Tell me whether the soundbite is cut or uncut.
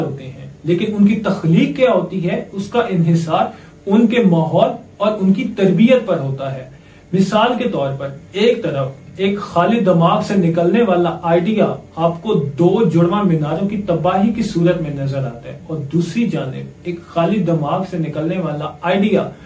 uncut